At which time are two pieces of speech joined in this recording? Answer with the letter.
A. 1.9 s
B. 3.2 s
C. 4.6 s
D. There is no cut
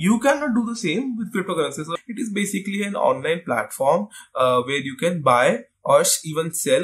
A